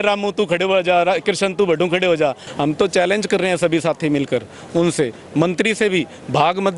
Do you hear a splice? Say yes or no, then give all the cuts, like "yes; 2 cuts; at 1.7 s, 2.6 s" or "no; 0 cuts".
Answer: yes; 1 cut; at 2.4 s